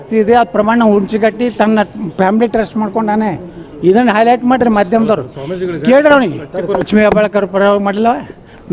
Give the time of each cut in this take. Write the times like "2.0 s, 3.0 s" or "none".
6.9 s